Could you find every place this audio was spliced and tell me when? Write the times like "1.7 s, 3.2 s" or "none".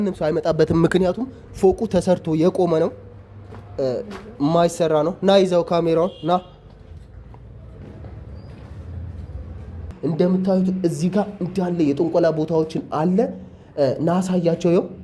9.9 s